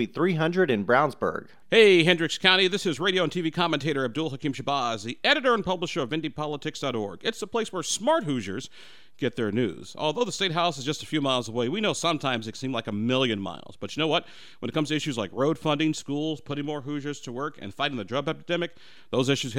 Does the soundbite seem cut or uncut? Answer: cut